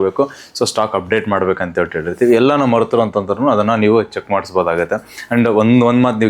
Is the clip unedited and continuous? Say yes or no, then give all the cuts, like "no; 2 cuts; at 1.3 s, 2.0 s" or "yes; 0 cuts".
yes; 0 cuts